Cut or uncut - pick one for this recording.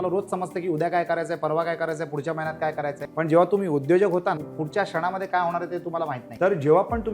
cut